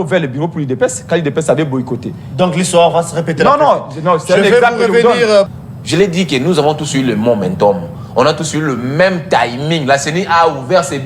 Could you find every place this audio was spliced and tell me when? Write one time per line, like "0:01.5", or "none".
0:05.5